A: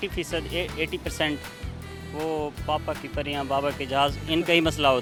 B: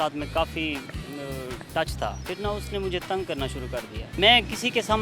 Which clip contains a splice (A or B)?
B